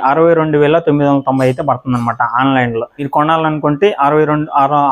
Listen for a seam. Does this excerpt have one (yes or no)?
no